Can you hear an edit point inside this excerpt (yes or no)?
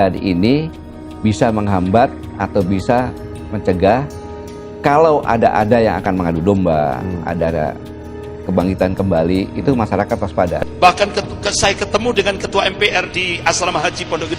yes